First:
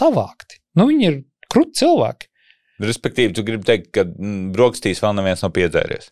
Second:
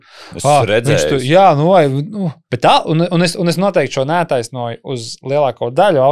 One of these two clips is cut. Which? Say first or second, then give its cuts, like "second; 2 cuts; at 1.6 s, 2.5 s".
second; 1 cut; at 2.4 s